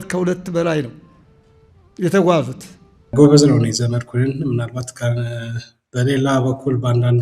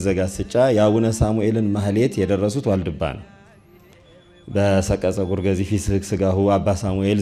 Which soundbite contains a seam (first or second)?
first